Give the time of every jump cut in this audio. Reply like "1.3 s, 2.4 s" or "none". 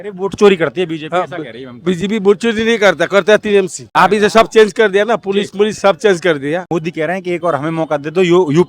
3.8 s, 6.6 s